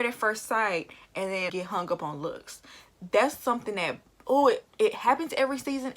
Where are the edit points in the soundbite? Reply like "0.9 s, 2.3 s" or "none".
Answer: 1.5 s